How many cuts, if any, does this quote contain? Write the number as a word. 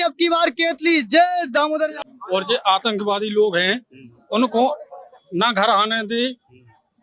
one